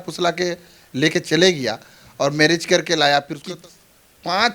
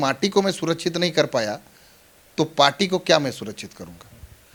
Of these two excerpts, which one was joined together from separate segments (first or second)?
first